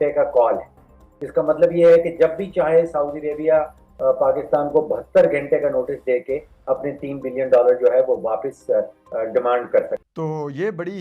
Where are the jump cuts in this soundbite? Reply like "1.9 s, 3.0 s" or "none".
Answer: 10.0 s